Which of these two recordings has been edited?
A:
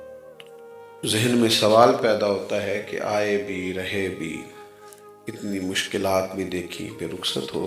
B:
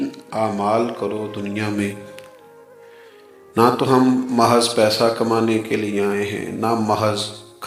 A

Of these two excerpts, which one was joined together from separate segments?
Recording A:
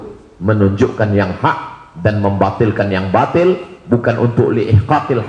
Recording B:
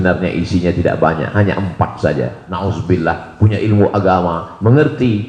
B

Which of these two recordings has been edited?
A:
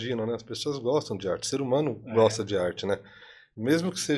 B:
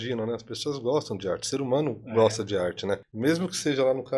B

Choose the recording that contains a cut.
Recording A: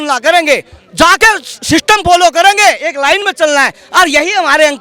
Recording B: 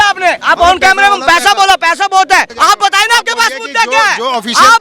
B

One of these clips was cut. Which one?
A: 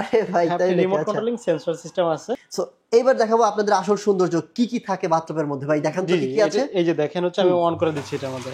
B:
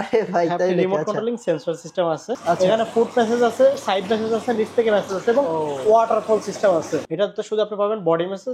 B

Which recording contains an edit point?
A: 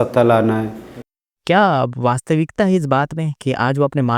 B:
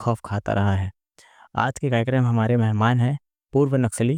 A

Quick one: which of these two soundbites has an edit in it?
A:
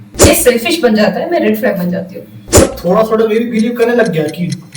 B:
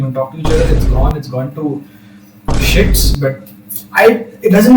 A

